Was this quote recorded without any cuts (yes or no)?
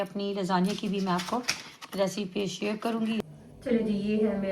no